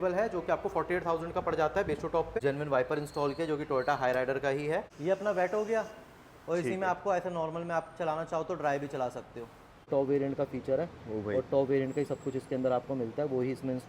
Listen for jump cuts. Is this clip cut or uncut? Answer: cut